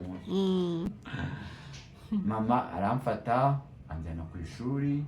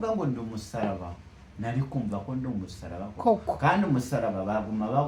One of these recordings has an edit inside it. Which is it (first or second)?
first